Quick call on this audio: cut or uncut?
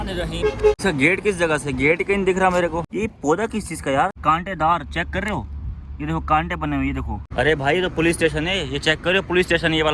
cut